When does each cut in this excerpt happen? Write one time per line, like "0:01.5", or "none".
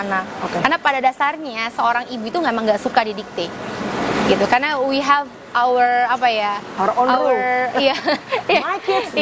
none